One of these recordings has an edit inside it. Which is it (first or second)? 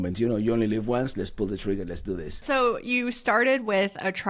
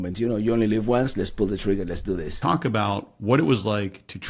second